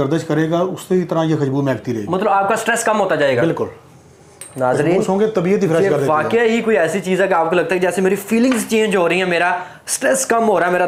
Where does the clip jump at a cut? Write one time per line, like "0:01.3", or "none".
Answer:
none